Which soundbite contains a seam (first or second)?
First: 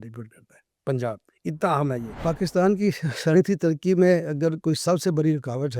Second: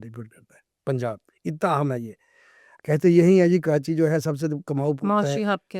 first